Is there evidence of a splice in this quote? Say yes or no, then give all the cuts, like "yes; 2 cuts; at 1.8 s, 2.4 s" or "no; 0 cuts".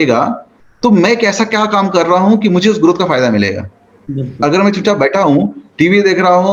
no; 0 cuts